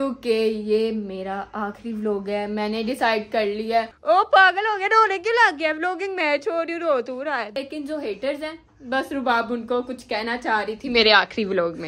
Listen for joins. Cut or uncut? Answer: cut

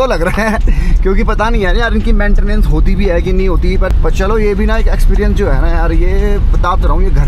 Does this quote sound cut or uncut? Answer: cut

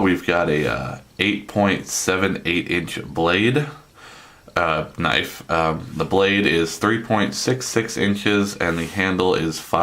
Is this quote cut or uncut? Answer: cut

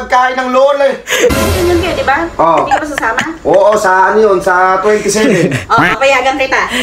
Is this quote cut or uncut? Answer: cut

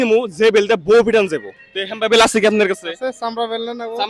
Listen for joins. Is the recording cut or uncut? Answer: cut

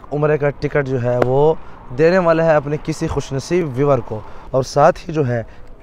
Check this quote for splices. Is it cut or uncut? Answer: cut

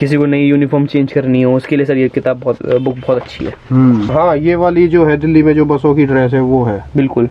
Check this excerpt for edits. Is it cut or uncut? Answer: cut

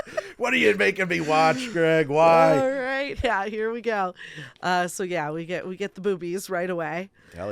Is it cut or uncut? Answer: cut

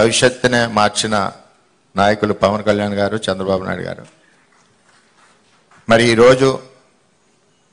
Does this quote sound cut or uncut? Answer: uncut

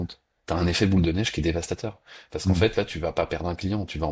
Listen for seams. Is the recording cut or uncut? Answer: uncut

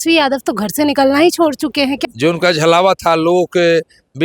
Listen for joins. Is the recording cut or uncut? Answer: cut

